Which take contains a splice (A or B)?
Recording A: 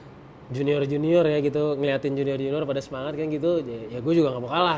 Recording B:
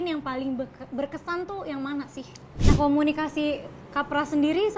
B